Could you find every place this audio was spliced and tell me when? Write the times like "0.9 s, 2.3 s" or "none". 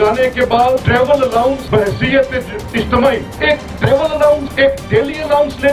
0.8 s, 1.6 s, 3.3 s, 4.5 s